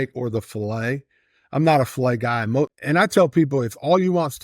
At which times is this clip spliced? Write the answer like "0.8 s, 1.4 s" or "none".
2.8 s

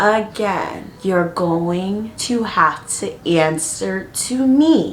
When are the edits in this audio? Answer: none

